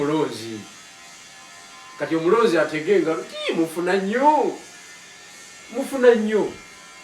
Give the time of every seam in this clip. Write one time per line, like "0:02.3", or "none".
none

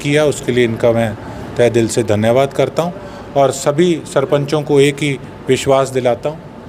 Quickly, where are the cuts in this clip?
none

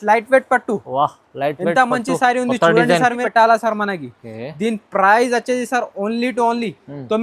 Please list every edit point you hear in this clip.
0:03.2

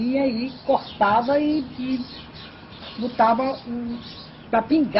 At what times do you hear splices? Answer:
none

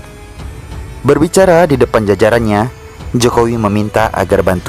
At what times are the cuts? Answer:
0:01.0

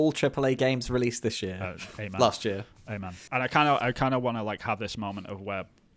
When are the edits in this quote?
0:03.2

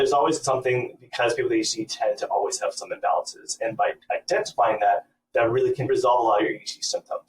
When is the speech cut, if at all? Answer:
0:05.9

